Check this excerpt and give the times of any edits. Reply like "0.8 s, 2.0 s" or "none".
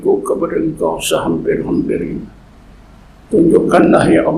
none